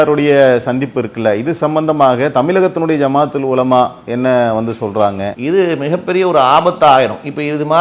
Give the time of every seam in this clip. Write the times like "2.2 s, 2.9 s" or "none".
5.3 s